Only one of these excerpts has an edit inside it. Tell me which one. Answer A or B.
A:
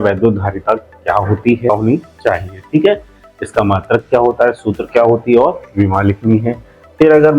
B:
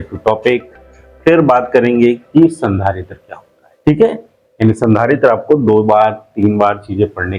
A